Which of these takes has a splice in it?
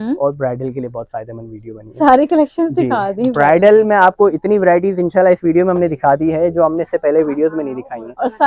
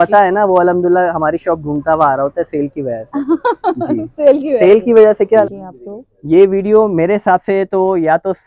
second; 1 cut; at 5.4 s

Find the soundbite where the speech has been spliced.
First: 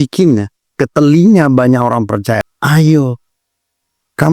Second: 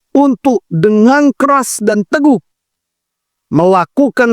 first; 1 cut; at 2.4 s

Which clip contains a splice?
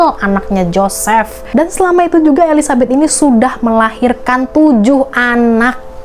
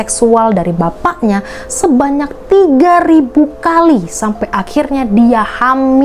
first; 1 cut; at 1.5 s

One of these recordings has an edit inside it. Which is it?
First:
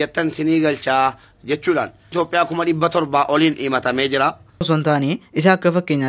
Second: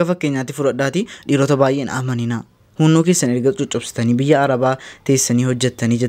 first; 2 cuts; at 2.1 s, 4.7 s

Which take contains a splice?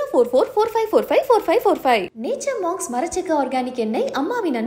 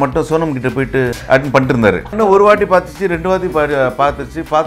second; 2 cuts; at 1.2 s, 2.2 s

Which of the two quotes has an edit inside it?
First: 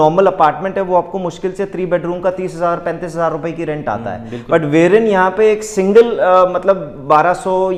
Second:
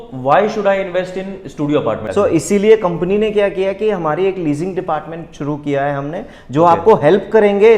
second; 1 cut; at 2.1 s

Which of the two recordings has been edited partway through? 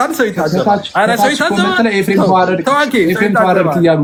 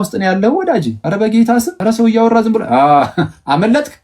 second; 2 cuts; at 1.0 s, 1.7 s

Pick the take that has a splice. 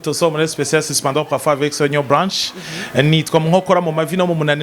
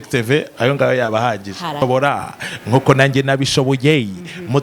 second; 1 cut; at 1.8 s

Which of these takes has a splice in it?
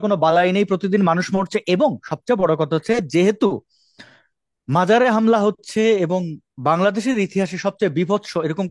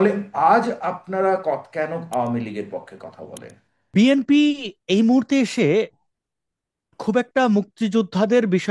second; 1 cut; at 3.9 s

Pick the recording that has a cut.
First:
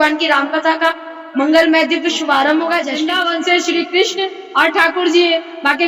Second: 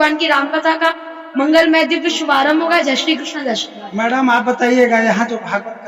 first; 1 cut; at 3.0 s

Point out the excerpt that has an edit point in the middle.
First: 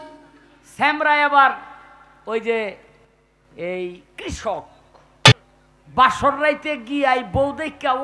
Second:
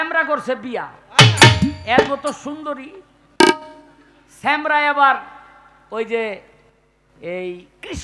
first; 1 cut; at 5.3 s

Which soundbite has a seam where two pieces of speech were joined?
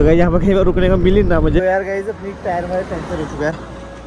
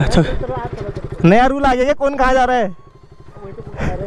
first; 1 cut; at 1.6 s

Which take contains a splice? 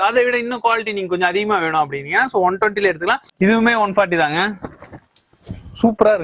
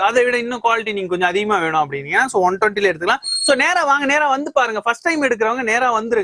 first; 1 cut; at 3.3 s

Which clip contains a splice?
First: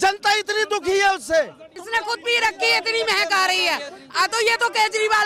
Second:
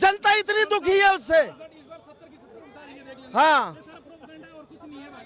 first; 1 cut; at 1.8 s

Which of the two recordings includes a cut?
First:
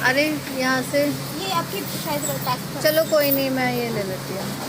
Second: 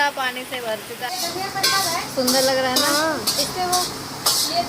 second; 1 cut; at 1.1 s

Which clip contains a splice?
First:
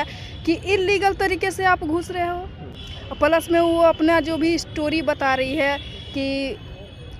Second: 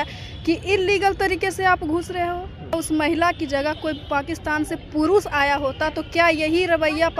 second; 1 cut; at 2.8 s

